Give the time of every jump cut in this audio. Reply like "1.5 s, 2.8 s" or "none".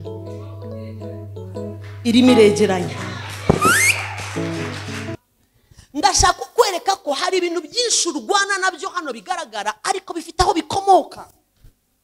5.2 s